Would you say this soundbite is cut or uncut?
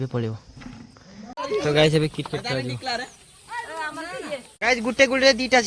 cut